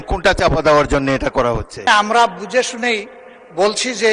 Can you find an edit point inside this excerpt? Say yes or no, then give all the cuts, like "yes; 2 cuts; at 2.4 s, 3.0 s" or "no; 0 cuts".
yes; 1 cut; at 1.9 s